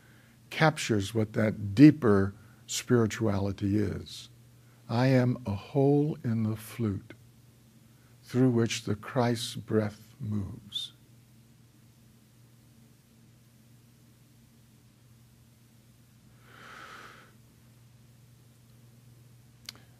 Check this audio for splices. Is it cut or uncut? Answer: uncut